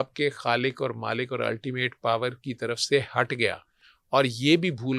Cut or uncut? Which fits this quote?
uncut